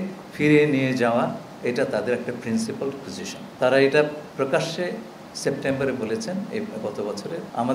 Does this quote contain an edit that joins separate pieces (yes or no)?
no